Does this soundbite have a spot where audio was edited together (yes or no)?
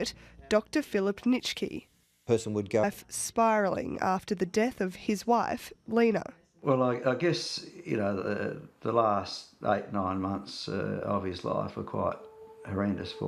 no